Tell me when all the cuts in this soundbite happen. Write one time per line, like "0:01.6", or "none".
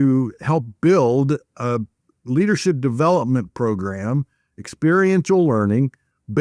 none